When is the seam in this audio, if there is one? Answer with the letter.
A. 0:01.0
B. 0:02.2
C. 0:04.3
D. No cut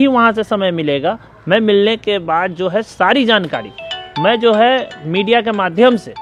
D